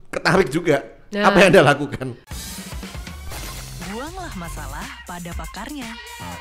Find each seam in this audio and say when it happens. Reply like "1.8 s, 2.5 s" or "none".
2.2 s